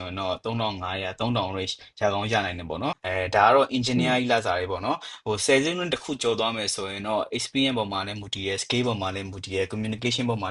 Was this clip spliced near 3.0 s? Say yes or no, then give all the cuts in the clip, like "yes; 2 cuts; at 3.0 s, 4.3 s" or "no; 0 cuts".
yes; 1 cut; at 3.0 s